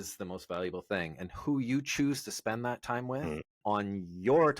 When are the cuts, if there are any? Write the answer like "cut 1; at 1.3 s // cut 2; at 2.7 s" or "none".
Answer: cut 1; at 3.5 s